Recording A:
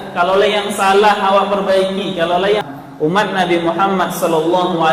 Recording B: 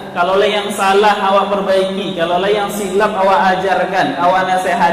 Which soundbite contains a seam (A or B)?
A